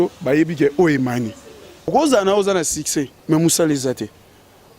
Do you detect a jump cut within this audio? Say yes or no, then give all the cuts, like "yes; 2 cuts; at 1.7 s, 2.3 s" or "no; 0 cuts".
yes; 1 cut; at 1.9 s